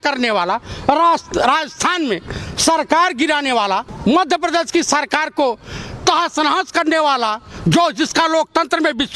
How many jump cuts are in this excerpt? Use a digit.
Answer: 1